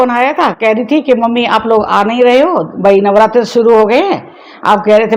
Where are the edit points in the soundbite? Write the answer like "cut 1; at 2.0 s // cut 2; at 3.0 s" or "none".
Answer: none